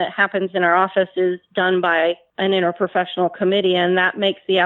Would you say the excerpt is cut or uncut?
cut